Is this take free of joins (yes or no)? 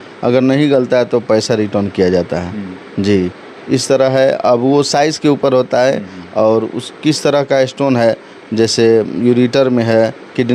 yes